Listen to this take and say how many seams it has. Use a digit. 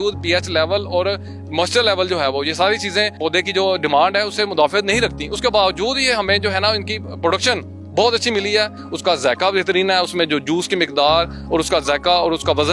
2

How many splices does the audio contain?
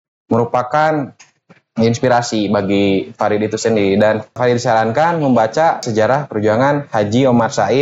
2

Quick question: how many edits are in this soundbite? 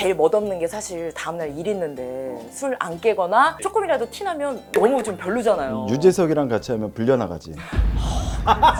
0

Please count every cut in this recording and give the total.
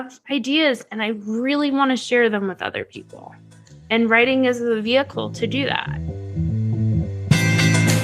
1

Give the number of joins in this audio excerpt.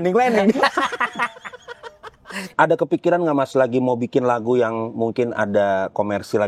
1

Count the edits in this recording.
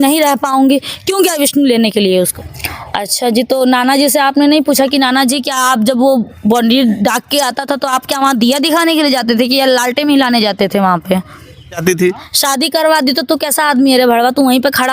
2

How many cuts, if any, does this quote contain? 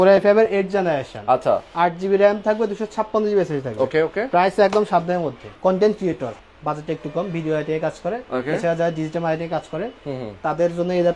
2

